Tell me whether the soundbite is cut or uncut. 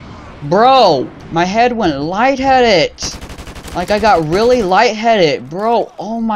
cut